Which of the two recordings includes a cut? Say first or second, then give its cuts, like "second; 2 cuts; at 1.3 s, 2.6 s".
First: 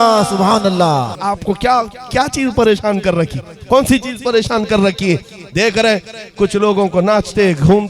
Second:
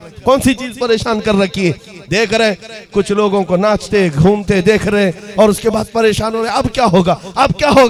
first; 1 cut; at 1.1 s